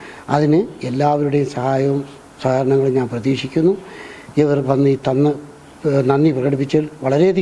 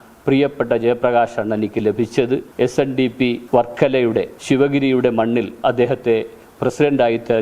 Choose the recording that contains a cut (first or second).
second